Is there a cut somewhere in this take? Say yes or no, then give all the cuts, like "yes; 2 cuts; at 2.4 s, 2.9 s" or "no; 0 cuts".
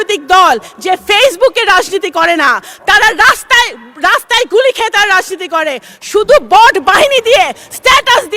no; 0 cuts